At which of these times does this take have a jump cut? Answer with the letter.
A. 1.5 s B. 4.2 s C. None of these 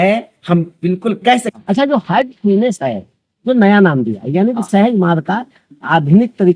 A